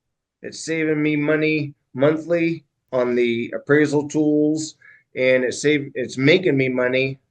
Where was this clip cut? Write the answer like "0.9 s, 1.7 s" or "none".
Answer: 2.7 s